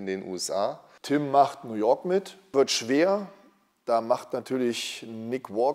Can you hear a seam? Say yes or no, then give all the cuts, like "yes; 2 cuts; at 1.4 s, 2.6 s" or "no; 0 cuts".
yes; 2 cuts; at 0.9 s, 2.4 s